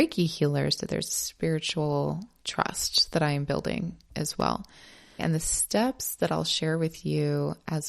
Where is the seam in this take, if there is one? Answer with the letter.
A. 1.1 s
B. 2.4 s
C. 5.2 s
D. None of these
C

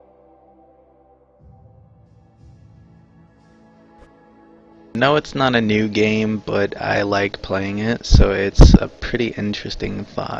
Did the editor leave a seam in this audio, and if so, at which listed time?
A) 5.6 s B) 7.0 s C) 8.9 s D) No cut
C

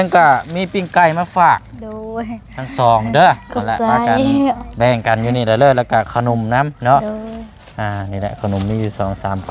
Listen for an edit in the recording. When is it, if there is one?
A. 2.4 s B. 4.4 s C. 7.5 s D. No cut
D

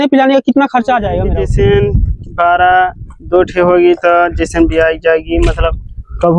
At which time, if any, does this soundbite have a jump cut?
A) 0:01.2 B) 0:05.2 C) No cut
A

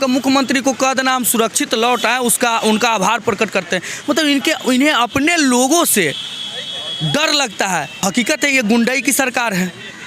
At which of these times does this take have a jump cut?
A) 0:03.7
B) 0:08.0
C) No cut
B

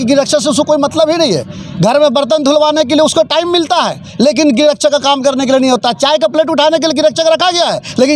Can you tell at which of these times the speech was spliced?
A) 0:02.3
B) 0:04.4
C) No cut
C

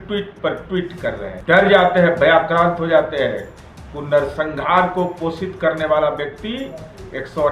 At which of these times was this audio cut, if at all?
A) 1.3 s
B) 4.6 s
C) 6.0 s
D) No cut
A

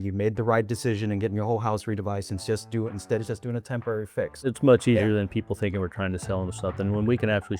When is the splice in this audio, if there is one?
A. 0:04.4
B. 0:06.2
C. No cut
A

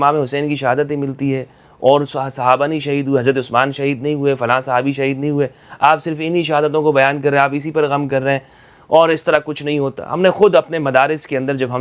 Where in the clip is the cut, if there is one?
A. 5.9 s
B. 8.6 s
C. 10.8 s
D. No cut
D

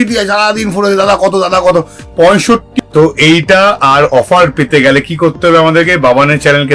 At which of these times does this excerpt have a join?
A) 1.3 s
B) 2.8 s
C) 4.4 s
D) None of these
B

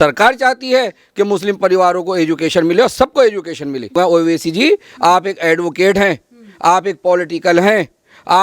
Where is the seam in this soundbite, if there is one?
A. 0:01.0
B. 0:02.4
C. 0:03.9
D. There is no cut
C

